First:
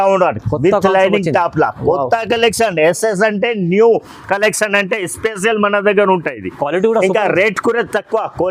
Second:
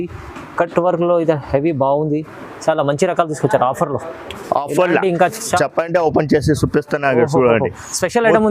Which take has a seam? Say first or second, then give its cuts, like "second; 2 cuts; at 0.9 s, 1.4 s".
second; 1 cut; at 5.6 s